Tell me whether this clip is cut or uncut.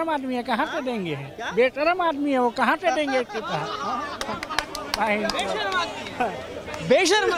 uncut